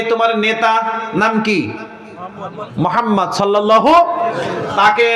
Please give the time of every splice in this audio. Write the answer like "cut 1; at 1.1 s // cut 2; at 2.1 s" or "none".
none